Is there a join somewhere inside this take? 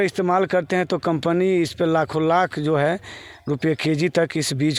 no; 0 cuts

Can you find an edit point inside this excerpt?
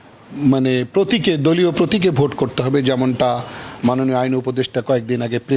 no; 0 cuts

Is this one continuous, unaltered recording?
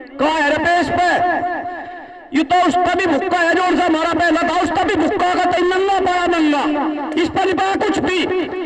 yes; 0 cuts

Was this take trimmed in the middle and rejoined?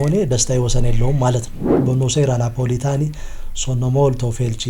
yes; 1 cut; at 1.8 s

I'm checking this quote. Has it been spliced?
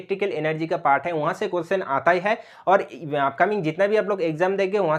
no; 0 cuts

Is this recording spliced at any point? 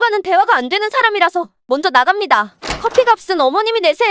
no; 0 cuts

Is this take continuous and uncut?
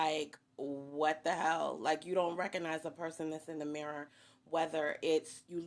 no; 1 cut; at 1.8 s

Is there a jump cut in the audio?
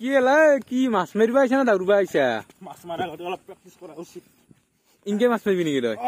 no; 0 cuts

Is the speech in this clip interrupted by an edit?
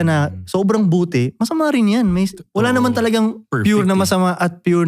no; 0 cuts

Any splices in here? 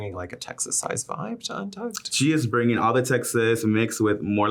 no; 0 cuts

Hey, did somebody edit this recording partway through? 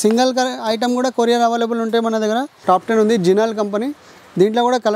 yes; 1 cut; at 2.5 s

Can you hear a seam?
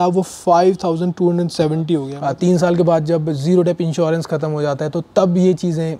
yes; 1 cut; at 2.1 s

